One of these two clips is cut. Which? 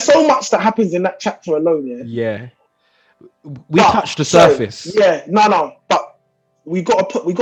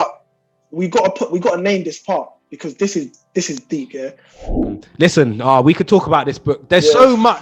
second; 1 cut; at 4.8 s

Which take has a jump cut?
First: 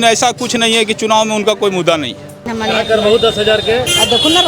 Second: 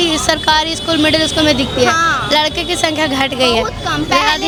first; 1 cut; at 2.4 s

